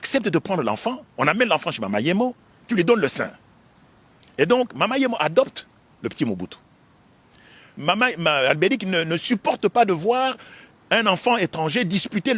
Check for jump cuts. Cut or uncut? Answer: cut